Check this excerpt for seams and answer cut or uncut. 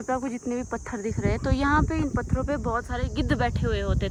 uncut